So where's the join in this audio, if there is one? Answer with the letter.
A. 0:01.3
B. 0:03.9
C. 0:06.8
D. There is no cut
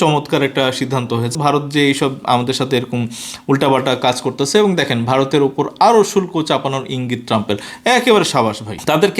A